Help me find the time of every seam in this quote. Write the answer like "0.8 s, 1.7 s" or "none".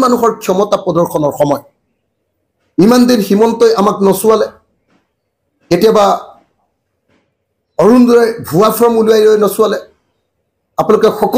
none